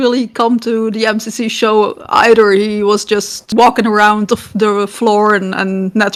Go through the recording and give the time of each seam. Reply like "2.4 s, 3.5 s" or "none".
none